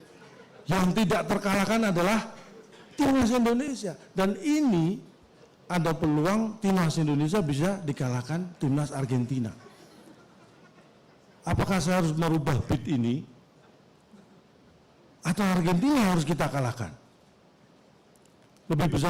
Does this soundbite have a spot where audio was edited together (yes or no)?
no